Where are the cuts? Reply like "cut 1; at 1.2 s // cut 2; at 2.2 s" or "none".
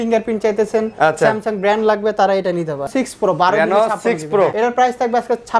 cut 1; at 2.9 s // cut 2; at 4.5 s